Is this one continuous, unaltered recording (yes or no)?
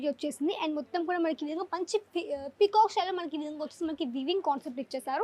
yes